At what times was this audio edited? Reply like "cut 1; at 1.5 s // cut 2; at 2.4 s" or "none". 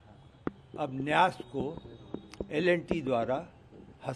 none